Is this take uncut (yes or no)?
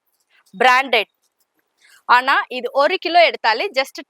yes